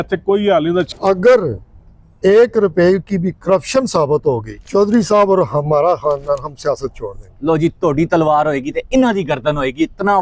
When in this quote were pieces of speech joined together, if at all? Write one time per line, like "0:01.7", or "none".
0:00.9
0:04.6

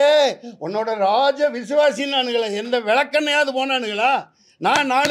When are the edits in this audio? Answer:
none

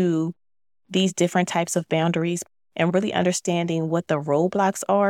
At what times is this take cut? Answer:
0:02.4

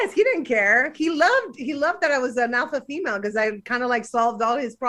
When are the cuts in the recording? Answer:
none

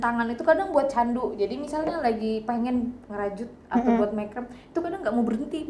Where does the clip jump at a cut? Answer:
none

